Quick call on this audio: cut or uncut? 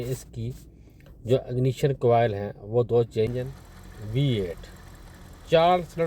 cut